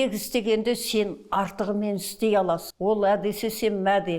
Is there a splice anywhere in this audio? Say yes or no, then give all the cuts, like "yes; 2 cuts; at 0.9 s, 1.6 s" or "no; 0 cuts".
yes; 1 cut; at 2.7 s